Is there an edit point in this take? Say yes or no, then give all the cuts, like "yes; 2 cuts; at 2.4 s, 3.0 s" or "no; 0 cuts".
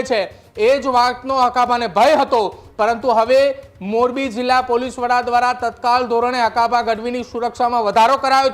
no; 0 cuts